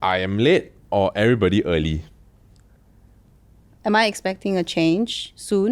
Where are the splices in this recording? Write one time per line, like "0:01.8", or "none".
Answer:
0:03.7